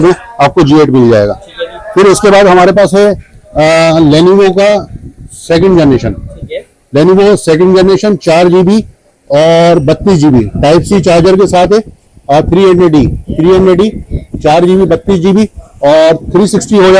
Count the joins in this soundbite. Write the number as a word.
zero